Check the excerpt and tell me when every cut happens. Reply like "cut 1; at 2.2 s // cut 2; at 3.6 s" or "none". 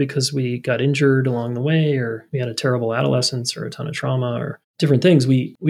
cut 1; at 2.2 s // cut 2; at 4.6 s